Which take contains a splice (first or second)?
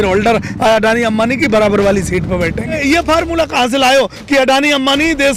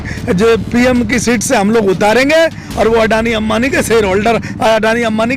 first